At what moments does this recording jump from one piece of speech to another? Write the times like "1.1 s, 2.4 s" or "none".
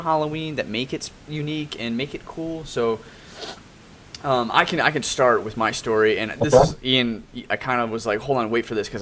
1.0 s